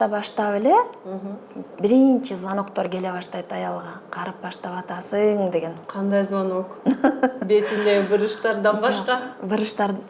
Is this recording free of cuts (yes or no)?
yes